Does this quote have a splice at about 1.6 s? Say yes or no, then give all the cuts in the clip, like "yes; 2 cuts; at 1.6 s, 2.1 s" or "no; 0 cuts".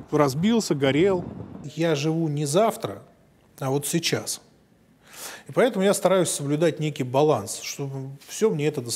yes; 1 cut; at 1.6 s